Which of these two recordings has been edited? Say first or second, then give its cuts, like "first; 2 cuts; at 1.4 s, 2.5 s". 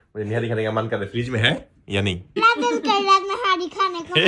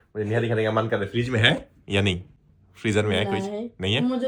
first; 1 cut; at 2.4 s